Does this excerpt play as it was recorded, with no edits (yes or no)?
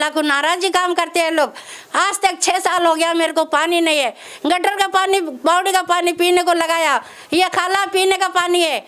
yes